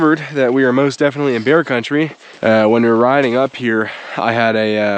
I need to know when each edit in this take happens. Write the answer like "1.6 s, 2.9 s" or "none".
2.2 s